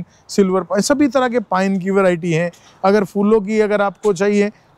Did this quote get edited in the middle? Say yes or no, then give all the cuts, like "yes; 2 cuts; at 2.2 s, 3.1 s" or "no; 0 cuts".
no; 0 cuts